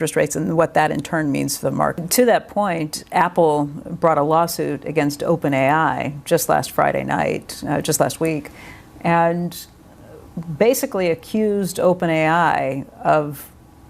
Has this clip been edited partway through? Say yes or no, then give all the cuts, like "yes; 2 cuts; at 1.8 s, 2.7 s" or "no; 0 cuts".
yes; 1 cut; at 2.0 s